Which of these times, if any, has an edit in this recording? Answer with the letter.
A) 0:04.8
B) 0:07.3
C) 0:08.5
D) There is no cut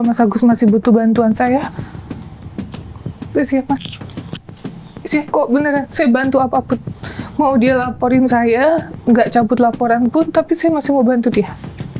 D